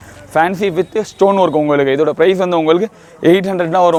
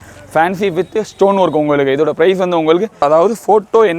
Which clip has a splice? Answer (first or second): second